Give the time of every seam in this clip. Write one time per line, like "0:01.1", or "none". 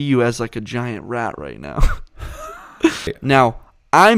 0:03.2

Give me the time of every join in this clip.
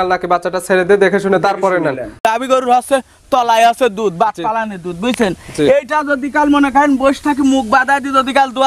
0:02.2

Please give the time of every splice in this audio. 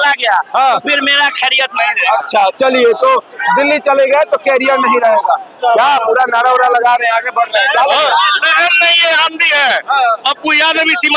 none

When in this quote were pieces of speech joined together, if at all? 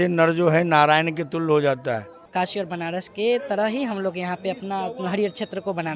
0:02.1

